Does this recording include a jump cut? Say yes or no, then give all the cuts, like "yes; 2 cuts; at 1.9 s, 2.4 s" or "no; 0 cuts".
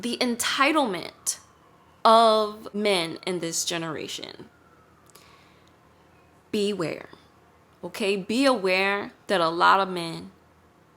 yes; 1 cut; at 2.6 s